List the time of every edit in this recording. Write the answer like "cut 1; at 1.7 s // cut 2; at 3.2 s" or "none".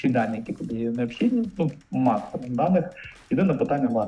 none